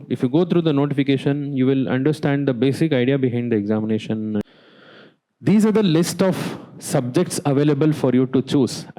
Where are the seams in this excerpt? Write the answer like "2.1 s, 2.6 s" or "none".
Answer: 4.4 s